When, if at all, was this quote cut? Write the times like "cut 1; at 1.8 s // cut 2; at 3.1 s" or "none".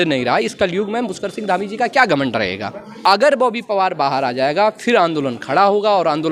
cut 1; at 2.9 s